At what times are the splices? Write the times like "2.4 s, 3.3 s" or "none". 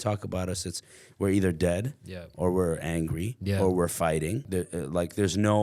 4.4 s

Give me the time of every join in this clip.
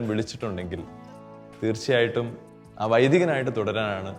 none

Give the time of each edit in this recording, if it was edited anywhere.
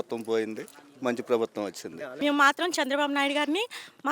2.1 s

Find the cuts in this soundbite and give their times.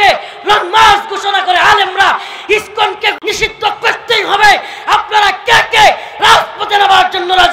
3.2 s

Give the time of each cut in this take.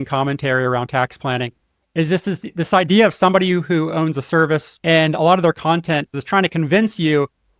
4.7 s, 6.1 s

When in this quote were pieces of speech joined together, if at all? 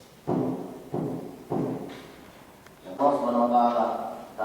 2.8 s

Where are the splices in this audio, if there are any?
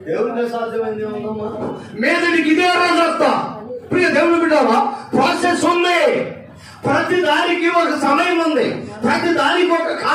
1.7 s

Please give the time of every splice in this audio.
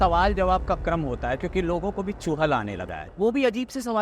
3.0 s

